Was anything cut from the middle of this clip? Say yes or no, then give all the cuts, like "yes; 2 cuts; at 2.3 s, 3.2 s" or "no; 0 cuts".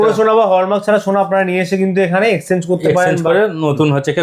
no; 0 cuts